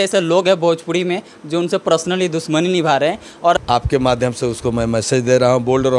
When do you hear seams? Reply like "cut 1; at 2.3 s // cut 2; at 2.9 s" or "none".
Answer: cut 1; at 3.6 s